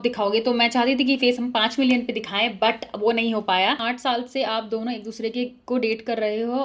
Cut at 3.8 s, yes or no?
yes